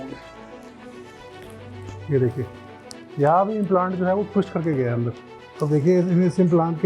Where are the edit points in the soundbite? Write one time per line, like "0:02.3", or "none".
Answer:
0:05.3